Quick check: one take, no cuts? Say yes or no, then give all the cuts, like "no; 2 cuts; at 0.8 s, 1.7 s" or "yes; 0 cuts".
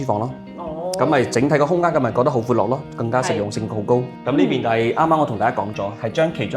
no; 1 cut; at 4.1 s